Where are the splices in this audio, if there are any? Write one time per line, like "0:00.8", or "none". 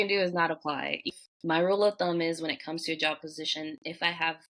0:01.0